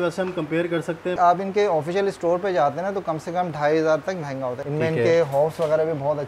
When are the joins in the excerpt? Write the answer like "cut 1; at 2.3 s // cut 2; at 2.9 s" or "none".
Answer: cut 1; at 1.2 s // cut 2; at 4.6 s